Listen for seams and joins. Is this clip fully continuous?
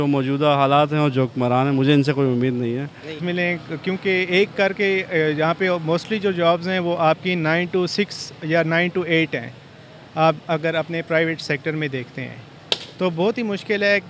no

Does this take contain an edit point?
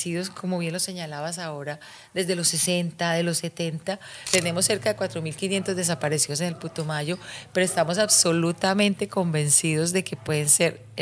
yes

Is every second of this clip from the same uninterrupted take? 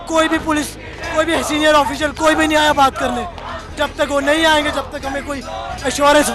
yes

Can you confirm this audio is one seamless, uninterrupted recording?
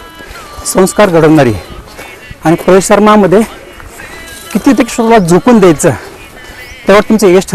yes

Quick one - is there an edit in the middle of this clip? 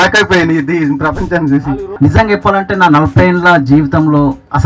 yes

